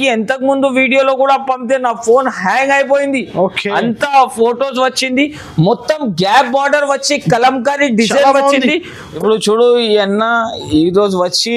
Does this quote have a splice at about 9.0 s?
yes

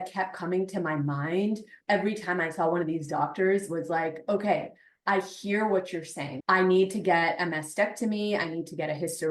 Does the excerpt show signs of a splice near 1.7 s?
yes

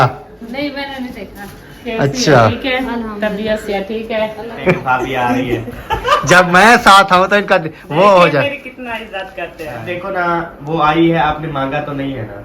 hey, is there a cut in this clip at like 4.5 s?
yes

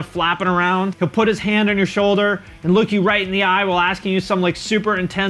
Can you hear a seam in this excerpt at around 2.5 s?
no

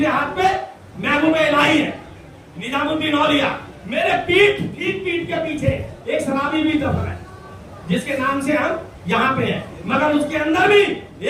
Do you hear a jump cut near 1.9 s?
no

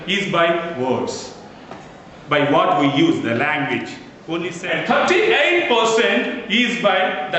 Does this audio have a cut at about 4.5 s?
yes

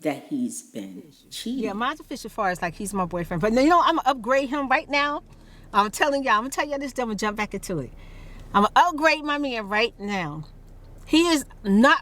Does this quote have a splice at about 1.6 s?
yes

